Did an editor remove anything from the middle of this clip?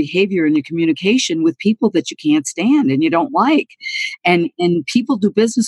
no; 0 cuts

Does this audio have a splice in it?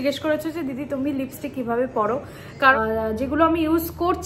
yes; 1 cut; at 2.7 s

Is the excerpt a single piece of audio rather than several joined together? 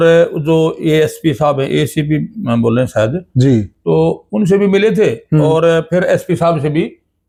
yes; 0 cuts

